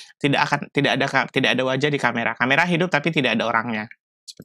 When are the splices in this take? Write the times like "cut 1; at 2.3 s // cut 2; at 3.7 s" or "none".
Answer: none